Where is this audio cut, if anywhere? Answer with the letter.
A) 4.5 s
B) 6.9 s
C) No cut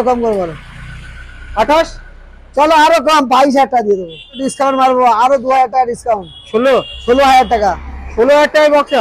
A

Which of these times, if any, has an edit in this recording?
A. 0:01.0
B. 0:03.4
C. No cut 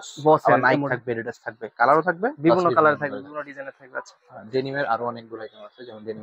C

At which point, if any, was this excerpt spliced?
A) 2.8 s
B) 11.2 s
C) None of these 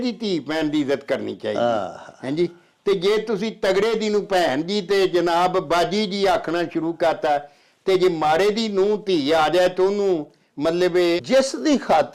B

